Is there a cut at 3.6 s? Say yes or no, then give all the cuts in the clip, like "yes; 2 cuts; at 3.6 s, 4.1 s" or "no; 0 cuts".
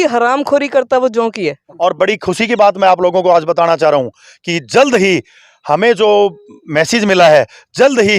no; 1 cut; at 1.7 s